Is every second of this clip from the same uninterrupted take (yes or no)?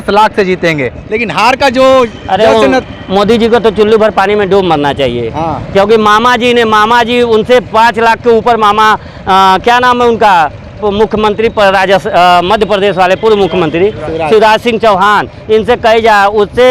yes